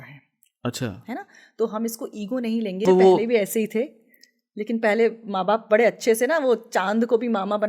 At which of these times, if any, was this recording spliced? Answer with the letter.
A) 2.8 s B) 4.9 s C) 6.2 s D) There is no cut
A